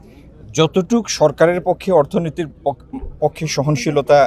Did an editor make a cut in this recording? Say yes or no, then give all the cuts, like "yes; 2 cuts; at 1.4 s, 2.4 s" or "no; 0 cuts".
no; 0 cuts